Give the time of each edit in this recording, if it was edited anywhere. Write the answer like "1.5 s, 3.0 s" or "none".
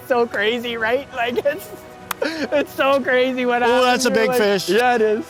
none